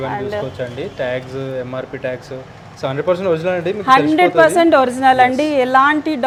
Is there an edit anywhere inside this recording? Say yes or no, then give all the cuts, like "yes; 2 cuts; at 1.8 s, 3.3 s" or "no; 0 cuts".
no; 0 cuts